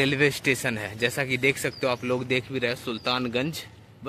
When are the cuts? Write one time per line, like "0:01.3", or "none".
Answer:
none